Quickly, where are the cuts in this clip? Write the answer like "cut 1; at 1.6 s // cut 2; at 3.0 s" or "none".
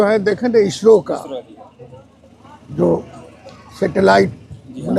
none

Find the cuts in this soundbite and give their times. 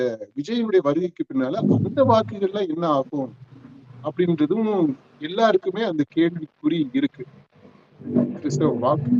cut 1; at 8.0 s

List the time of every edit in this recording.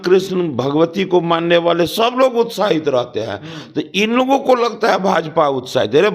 none

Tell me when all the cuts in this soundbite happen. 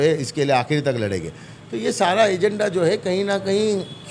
none

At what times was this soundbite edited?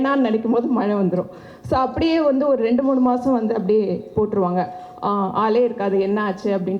none

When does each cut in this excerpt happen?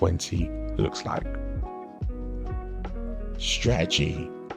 none

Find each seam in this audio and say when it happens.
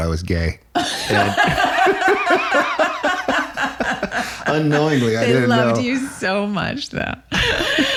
none

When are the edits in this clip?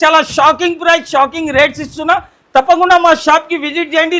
none

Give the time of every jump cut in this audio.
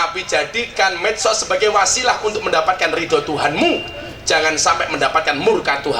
none

